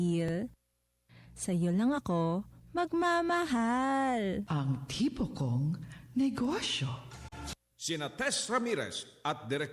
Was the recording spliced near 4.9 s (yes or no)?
no